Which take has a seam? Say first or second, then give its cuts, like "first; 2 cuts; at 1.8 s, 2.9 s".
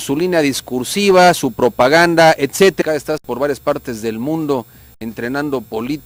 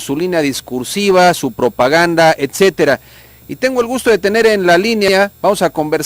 second; 1 cut; at 2.8 s